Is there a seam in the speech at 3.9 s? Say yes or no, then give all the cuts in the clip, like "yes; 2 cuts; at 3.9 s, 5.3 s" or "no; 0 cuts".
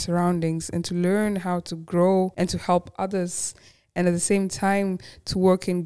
no; 1 cut; at 2.3 s